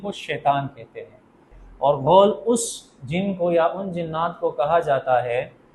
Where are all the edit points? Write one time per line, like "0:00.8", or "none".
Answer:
0:01.6